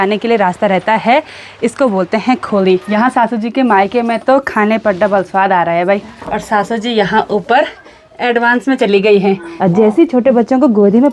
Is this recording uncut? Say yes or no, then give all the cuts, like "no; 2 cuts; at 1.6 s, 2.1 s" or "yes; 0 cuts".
no; 3 cuts; at 2.9 s, 6.1 s, 9.5 s